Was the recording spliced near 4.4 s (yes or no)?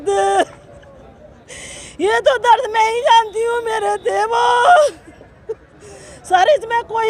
no